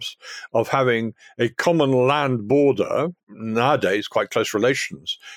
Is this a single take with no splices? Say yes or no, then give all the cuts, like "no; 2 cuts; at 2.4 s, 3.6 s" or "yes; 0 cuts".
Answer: no; 1 cut; at 3.3 s